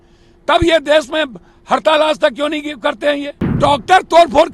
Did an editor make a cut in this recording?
yes; 1 cut; at 3.6 s

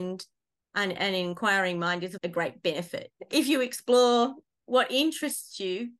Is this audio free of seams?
no; 1 cut; at 3.2 s

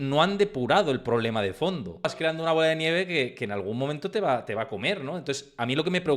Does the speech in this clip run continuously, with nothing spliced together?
no; 1 cut; at 2.1 s

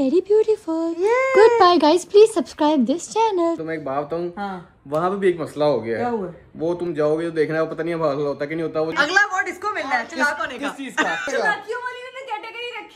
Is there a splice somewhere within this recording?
yes; 3 cuts; at 3.6 s, 8.9 s, 11.3 s

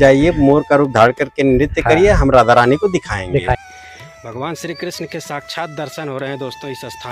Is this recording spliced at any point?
yes; 1 cut; at 3.7 s

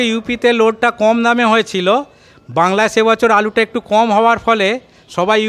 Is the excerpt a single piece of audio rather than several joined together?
yes; 0 cuts

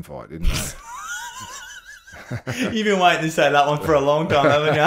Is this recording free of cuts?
yes; 0 cuts

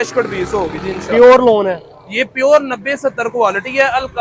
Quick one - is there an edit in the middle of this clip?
no; 0 cuts

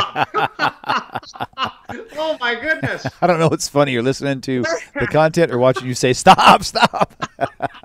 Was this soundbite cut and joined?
no; 0 cuts

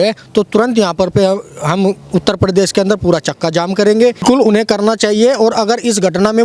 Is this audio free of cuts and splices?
no; 1 cut; at 4.2 s

